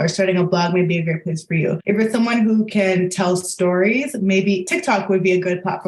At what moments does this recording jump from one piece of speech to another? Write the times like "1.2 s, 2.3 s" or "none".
1.8 s